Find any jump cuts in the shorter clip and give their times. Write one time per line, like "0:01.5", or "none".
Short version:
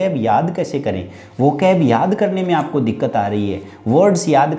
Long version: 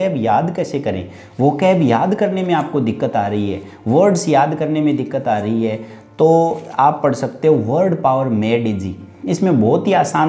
none